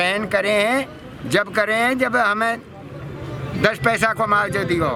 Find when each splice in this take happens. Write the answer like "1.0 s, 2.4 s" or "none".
none